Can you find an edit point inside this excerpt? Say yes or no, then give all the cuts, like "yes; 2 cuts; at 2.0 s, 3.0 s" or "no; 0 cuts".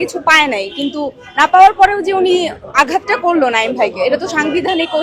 no; 0 cuts